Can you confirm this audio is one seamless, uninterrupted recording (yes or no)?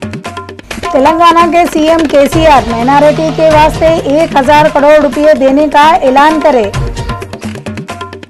yes